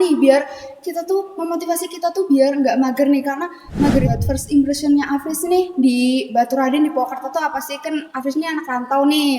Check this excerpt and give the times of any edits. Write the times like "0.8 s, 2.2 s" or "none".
4.1 s